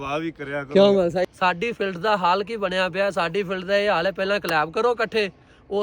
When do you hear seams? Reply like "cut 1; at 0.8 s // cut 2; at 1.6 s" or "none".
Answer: cut 1; at 1.3 s